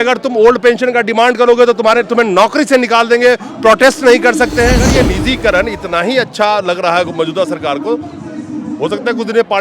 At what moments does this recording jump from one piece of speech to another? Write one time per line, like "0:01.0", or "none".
0:04.8